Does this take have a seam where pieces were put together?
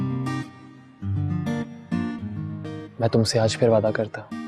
no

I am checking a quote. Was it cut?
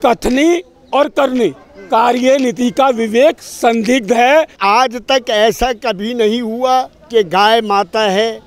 yes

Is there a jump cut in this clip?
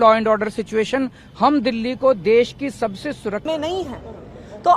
yes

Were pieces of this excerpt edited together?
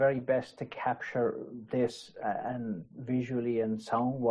no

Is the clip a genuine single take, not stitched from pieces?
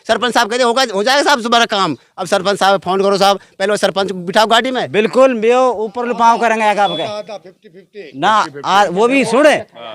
no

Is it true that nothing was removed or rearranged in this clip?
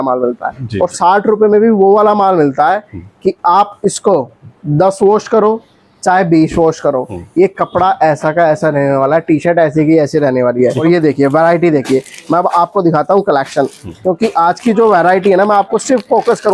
no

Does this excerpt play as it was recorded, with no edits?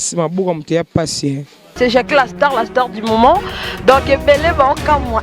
no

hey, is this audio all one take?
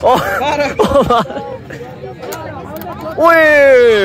yes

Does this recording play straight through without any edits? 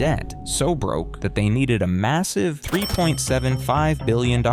yes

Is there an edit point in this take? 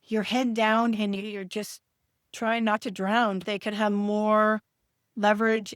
yes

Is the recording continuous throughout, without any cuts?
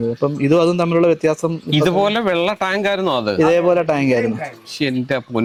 yes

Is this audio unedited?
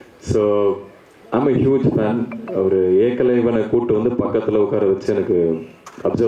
yes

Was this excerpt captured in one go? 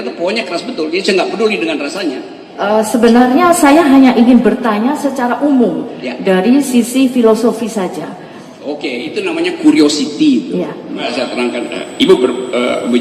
no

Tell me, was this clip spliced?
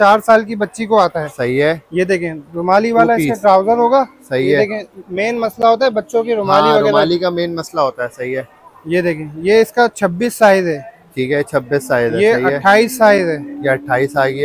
no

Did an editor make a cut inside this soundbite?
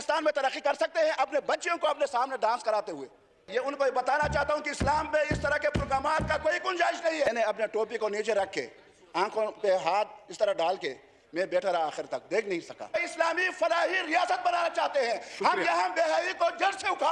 yes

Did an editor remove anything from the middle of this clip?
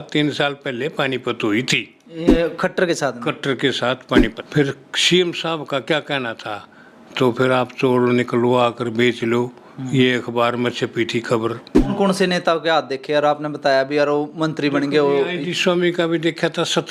yes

